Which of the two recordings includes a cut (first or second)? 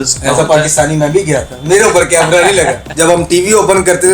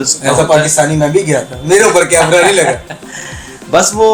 first